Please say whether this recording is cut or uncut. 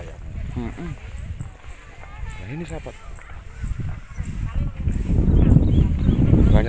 uncut